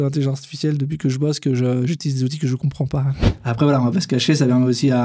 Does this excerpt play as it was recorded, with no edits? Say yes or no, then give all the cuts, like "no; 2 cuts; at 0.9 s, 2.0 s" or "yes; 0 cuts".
no; 1 cut; at 3.2 s